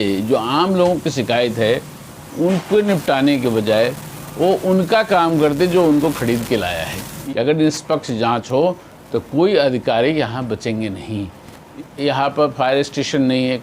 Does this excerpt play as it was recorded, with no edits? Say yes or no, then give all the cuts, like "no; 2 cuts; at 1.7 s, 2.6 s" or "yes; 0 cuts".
no; 2 cuts; at 7.1 s, 11.8 s